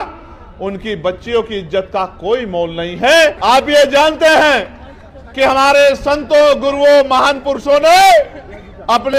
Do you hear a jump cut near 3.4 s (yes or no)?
yes